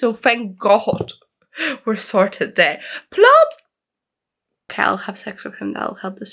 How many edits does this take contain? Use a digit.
1